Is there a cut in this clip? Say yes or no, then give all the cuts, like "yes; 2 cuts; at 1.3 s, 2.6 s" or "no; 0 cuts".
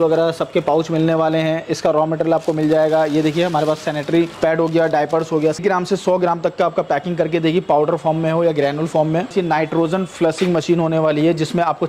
yes; 3 cuts; at 4.3 s, 5.6 s, 9.3 s